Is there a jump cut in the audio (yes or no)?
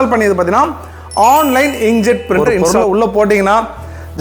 yes